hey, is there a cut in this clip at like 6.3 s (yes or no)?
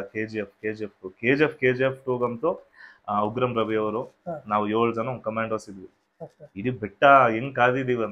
no